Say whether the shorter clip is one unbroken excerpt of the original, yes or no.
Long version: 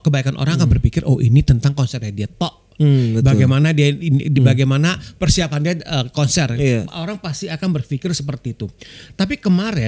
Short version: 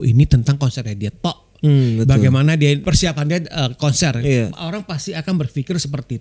no